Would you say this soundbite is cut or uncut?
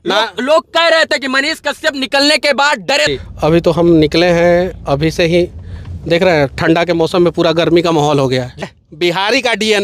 cut